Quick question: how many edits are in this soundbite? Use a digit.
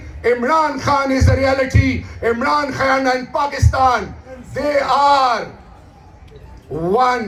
0